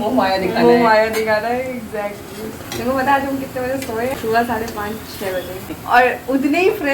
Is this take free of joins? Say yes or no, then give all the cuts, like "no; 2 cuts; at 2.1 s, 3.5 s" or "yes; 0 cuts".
no; 3 cuts; at 2.7 s, 4.1 s, 5.7 s